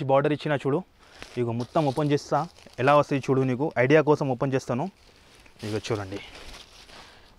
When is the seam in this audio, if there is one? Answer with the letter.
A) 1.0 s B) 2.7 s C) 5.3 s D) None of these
D